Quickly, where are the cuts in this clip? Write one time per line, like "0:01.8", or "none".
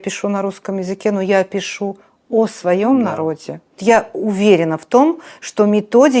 0:03.7